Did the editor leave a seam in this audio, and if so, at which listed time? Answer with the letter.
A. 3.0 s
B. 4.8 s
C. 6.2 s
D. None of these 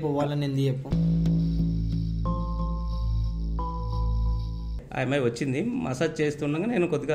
B